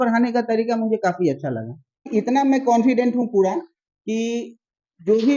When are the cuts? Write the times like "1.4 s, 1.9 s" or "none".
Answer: 2.1 s

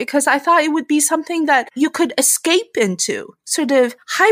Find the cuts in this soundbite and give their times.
1.7 s, 3.3 s

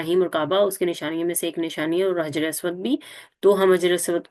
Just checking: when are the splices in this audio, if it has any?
none

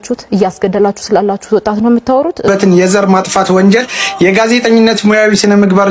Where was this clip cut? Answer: 2.5 s

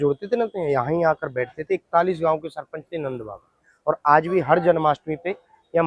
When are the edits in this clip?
none

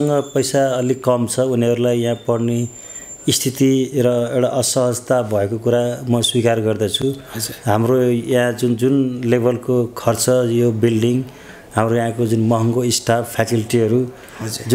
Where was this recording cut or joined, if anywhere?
none

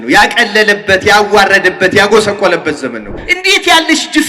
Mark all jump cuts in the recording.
3.2 s

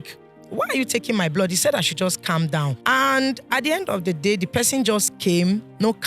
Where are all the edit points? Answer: 2.8 s

